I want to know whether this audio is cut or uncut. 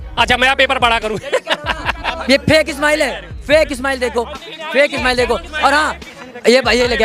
cut